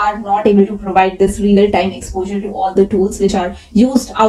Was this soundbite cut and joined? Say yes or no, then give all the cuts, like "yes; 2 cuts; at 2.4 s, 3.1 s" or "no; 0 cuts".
no; 0 cuts